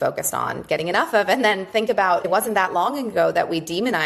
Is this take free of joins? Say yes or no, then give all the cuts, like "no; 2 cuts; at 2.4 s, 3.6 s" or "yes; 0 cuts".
yes; 0 cuts